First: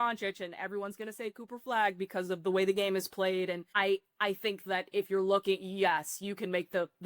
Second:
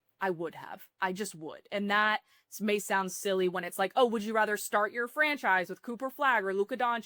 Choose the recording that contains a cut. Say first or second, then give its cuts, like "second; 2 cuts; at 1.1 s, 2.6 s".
first; 1 cut; at 3.7 s